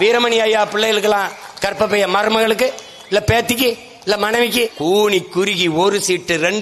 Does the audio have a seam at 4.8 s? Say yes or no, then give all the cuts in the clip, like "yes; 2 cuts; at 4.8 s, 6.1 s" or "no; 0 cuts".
yes; 1 cut; at 4.8 s